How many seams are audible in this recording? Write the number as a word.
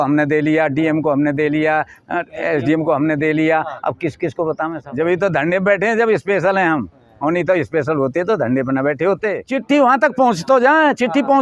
two